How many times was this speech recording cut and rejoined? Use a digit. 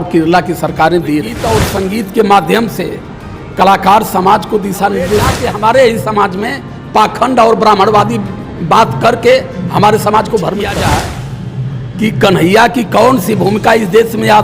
3